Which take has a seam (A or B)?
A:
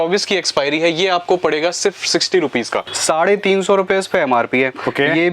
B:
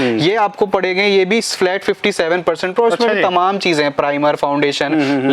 A